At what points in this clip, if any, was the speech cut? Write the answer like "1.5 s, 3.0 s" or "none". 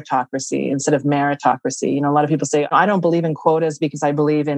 2.7 s